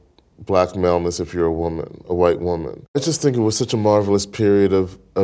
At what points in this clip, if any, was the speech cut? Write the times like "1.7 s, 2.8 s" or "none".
3.0 s